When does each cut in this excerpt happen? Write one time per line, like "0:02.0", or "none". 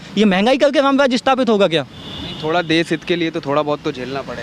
none